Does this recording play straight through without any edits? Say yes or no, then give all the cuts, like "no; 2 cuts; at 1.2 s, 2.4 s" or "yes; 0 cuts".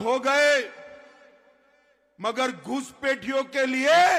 yes; 0 cuts